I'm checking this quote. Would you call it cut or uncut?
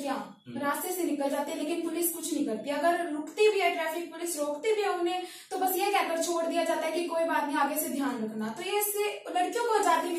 uncut